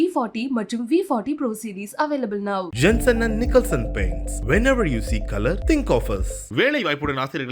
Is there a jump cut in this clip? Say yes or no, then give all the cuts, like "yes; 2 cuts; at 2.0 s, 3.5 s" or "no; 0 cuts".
no; 0 cuts